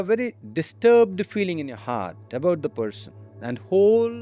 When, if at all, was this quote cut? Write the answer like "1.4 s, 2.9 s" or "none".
none